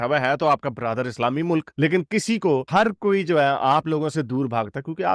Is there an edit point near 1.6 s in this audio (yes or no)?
no